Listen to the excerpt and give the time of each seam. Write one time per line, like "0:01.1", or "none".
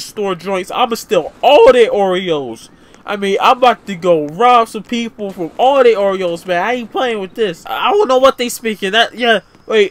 0:07.7